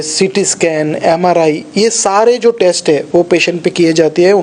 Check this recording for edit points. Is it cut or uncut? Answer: uncut